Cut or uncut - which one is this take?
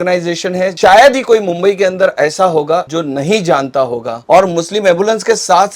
uncut